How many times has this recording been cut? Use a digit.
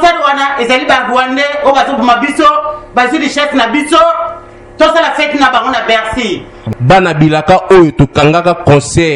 1